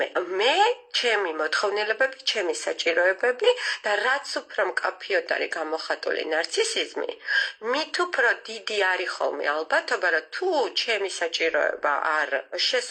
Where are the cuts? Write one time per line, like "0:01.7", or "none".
none